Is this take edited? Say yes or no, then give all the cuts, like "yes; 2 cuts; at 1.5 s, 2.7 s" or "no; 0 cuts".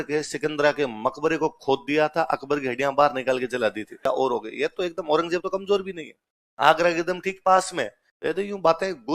yes; 1 cut; at 4.0 s